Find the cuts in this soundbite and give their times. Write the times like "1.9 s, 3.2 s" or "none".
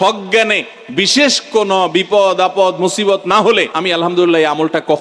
3.7 s